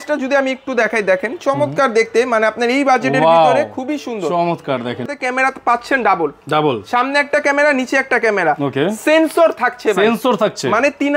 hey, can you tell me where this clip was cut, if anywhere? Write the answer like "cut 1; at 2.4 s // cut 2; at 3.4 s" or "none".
cut 1; at 5.1 s

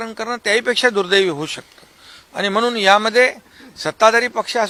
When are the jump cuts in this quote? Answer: none

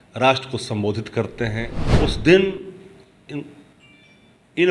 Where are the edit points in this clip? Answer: cut 1; at 1.8 s

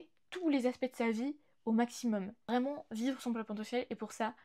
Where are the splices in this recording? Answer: cut 1; at 2.5 s

